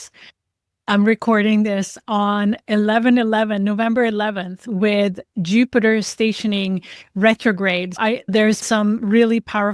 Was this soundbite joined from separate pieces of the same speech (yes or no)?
yes